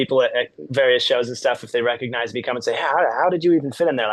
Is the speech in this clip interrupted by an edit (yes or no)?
no